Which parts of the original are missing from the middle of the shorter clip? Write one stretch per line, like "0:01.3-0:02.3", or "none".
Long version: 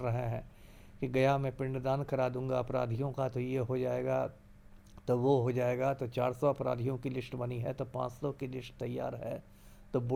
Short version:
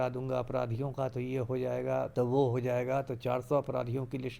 0:04.3-0:05.0